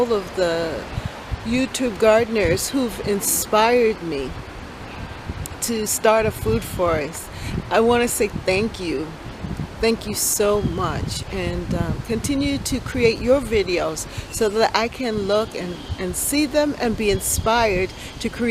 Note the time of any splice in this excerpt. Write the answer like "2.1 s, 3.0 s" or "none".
0.9 s